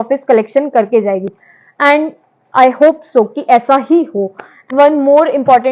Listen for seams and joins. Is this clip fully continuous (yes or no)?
no